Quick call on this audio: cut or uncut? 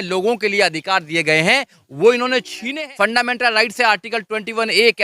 cut